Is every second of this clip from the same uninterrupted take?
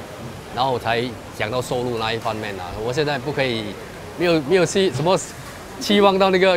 yes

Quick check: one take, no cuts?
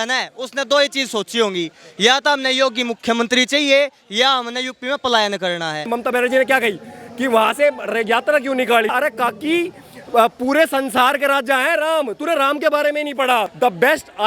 no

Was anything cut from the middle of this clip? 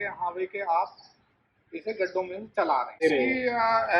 yes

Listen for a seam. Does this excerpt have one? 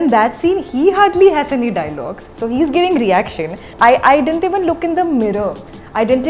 yes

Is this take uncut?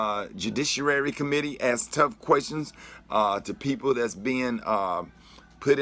no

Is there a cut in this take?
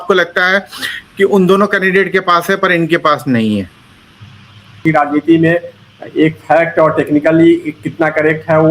yes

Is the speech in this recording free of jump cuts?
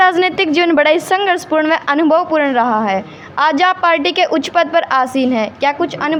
yes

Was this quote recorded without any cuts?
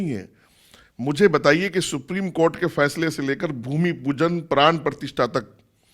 yes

